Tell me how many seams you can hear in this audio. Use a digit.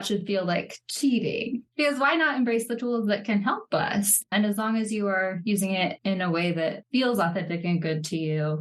2